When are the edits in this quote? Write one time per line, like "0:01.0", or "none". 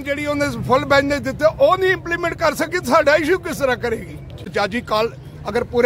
0:04.4